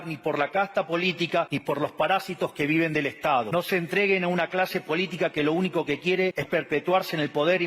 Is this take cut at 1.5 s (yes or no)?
yes